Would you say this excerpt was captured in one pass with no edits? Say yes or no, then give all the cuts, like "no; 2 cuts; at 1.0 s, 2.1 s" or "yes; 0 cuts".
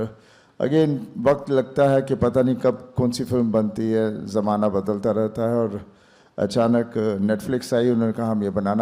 yes; 0 cuts